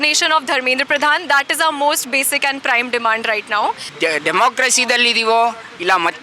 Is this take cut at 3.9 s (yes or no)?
yes